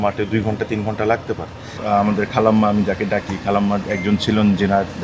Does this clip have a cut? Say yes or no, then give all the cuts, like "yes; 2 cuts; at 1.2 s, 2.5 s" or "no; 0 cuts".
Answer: yes; 1 cut; at 1.8 s